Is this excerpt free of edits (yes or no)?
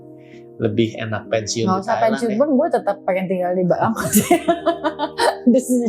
yes